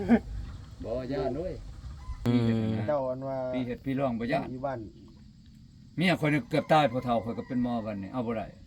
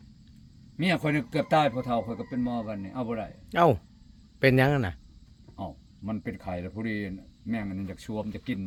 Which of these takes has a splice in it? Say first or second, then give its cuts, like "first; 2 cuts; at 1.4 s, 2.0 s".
first; 1 cut; at 2.2 s